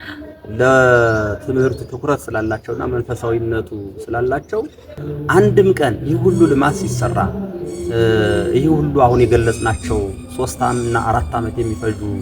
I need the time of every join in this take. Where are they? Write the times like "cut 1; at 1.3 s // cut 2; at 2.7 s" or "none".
cut 1; at 5.0 s